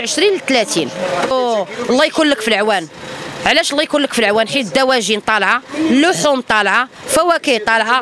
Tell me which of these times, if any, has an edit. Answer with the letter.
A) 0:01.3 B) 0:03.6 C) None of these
A